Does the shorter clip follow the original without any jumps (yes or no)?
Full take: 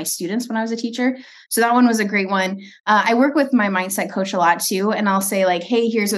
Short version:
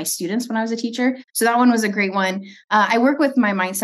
no